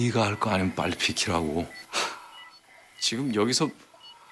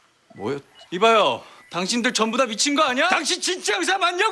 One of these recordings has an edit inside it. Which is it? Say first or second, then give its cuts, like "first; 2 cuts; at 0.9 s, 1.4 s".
second; 1 cut; at 3.2 s